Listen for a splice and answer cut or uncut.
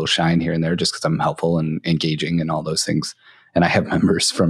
uncut